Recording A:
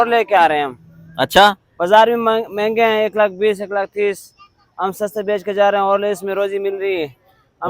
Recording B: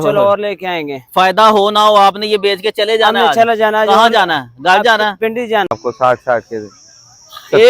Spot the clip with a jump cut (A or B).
B